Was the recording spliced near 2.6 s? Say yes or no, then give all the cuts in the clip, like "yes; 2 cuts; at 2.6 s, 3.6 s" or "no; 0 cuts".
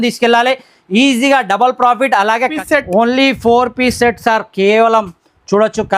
yes; 1 cut; at 2.6 s